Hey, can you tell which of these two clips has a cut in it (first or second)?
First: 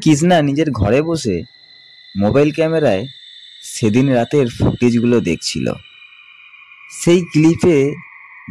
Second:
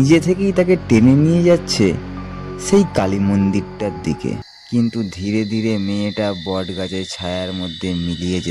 second